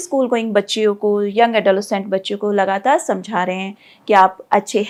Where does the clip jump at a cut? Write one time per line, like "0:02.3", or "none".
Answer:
none